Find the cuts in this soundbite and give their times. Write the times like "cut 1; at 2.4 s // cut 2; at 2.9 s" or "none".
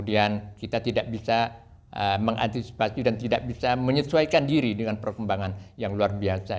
none